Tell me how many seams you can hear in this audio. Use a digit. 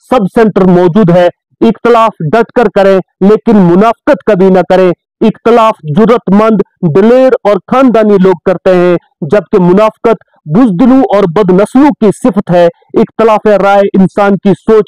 1